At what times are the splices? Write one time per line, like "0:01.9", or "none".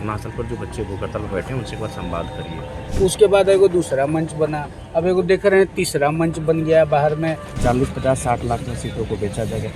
0:02.8
0:07.6

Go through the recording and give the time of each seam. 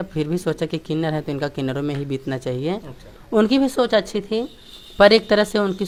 none

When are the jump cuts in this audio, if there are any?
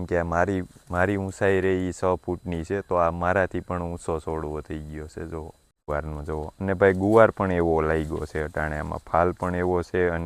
none

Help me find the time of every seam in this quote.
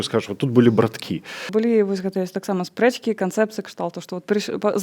0:01.5

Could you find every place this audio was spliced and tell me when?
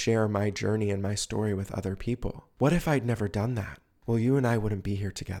0:02.4

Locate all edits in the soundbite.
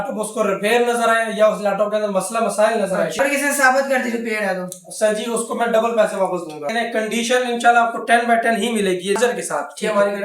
0:03.2
0:06.6
0:09.2

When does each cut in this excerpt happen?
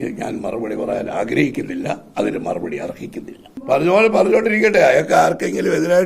0:03.5

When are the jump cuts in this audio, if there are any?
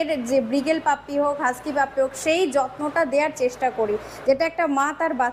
none

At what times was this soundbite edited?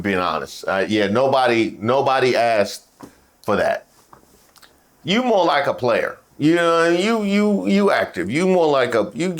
none

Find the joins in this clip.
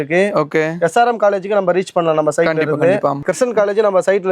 none

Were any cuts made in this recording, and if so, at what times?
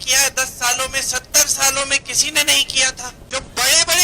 0:03.1

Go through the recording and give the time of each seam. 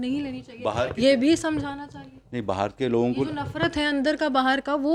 none

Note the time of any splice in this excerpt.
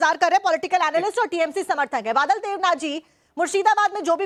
none

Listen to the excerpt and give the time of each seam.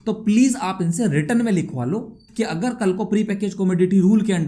0:02.2

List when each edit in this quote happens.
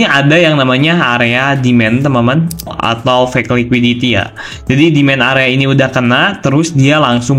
0:02.8

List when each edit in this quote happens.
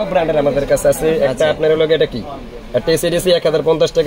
none

